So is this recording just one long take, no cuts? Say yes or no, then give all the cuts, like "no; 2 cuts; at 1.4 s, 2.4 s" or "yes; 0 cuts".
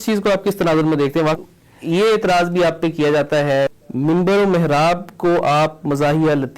no; 2 cuts; at 1.4 s, 3.7 s